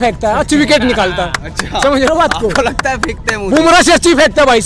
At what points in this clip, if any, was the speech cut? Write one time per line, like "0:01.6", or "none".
none